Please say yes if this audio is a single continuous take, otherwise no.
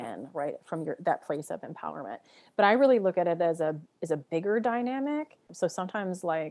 no